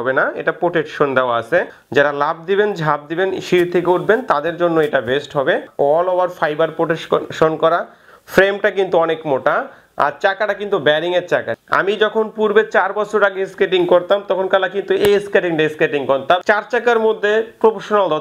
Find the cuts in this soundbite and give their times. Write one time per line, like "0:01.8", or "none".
0:01.8
0:05.7
0:11.5
0:16.4